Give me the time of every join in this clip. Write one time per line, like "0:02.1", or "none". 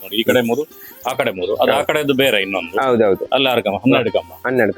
none